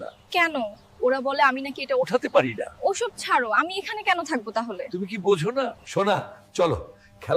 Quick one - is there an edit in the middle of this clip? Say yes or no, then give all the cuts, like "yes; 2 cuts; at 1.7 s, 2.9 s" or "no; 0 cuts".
no; 0 cuts